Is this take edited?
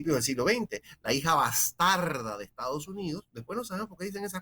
no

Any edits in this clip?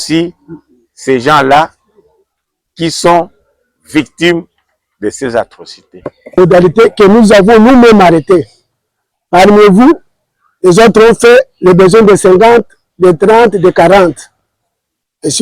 yes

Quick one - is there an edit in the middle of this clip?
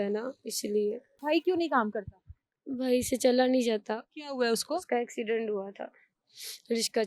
yes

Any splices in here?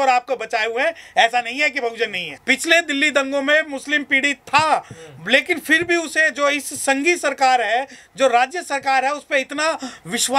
yes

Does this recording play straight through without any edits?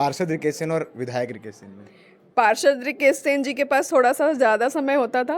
yes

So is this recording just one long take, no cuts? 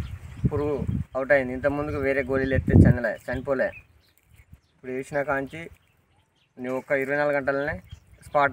yes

